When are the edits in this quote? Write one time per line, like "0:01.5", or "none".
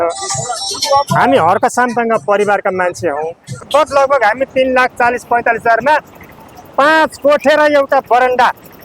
0:03.6